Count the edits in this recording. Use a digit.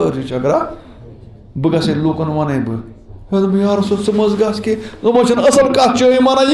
0